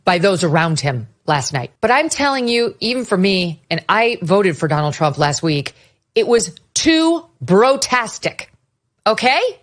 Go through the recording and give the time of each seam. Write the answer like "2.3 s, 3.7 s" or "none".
1.6 s